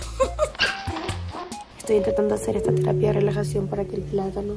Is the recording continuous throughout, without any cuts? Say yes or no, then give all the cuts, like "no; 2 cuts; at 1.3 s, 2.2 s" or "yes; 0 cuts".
yes; 0 cuts